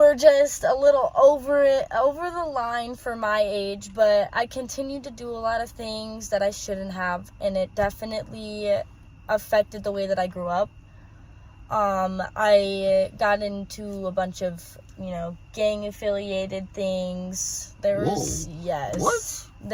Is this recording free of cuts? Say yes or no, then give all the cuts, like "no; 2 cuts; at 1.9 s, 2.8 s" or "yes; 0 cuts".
yes; 0 cuts